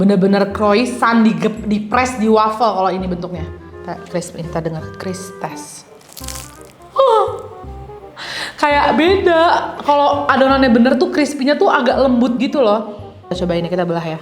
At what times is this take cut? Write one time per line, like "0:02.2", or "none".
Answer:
0:13.3

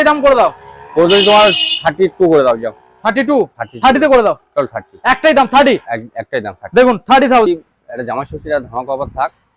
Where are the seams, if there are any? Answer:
0:07.5

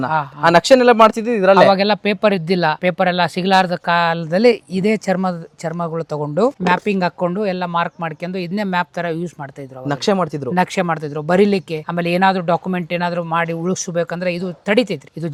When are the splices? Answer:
none

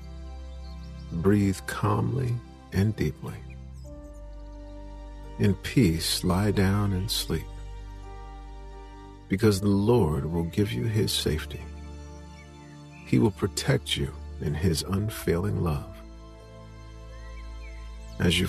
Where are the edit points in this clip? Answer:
0:01.0
0:03.4
0:04.8
0:07.6
0:09.3

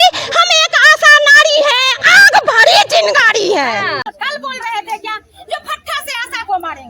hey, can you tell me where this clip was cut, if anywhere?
0:04.0

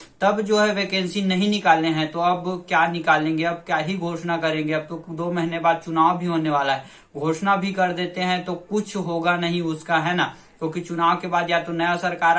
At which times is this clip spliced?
none

